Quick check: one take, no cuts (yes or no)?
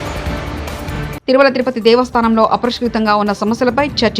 no